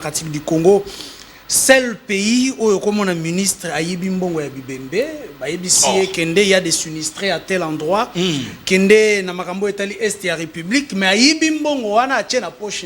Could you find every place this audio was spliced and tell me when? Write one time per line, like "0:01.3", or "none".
none